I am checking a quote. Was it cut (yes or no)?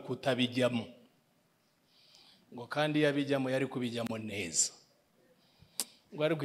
no